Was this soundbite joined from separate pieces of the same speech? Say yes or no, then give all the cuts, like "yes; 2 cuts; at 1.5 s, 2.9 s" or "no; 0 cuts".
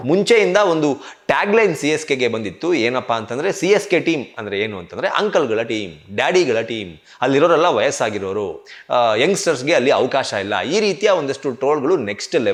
no; 0 cuts